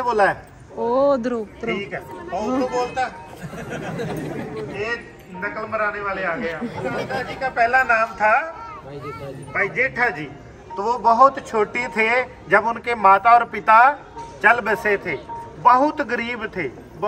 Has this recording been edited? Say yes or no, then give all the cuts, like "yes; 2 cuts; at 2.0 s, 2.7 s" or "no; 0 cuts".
no; 0 cuts